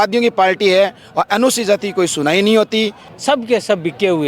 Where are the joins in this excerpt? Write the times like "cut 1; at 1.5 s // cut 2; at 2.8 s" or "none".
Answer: cut 1; at 3.1 s